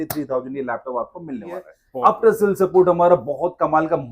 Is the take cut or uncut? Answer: cut